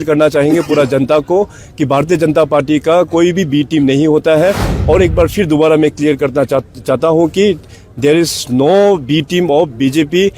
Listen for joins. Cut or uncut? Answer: cut